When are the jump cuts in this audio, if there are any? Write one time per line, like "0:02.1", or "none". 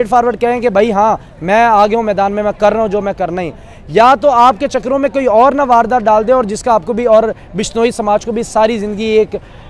none